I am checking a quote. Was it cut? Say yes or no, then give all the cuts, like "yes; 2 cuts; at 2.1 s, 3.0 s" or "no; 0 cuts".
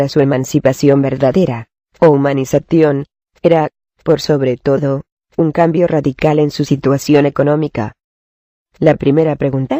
no; 0 cuts